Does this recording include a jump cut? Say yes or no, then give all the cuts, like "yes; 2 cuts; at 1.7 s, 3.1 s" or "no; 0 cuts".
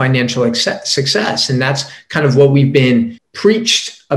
yes; 1 cut; at 3.2 s